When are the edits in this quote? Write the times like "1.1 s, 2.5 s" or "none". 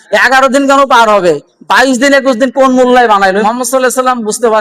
3.4 s